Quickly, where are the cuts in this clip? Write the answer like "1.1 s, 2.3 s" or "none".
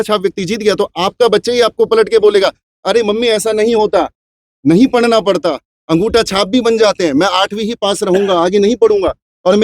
none